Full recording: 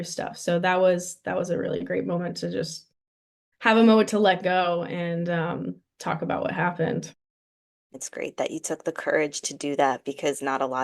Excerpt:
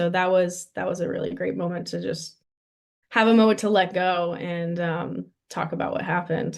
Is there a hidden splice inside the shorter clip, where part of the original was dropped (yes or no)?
no